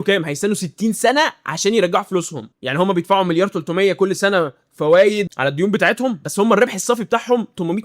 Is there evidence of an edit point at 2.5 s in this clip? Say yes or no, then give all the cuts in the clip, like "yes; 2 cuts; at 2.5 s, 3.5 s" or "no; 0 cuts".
yes; 1 cut; at 2.5 s